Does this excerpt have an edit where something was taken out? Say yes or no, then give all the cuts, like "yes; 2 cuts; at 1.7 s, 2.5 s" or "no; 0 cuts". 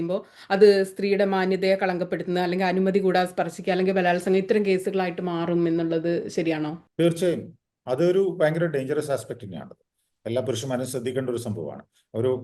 yes; 1 cut; at 6.8 s